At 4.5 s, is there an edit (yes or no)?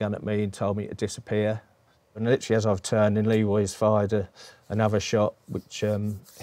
no